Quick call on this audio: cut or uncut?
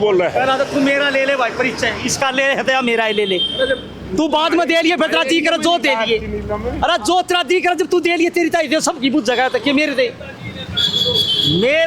uncut